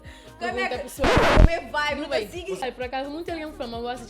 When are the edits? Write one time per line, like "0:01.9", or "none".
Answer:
0:02.6